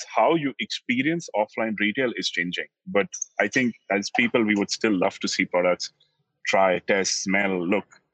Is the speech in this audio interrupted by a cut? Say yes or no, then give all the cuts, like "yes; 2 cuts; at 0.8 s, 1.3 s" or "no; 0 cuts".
no; 0 cuts